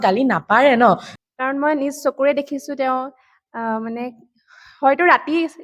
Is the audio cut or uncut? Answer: cut